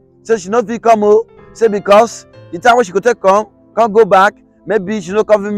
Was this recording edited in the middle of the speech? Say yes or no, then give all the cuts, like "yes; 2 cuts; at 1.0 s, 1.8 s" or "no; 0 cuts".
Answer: no; 0 cuts